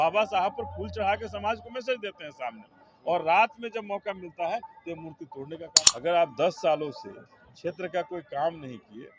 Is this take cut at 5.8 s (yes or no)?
yes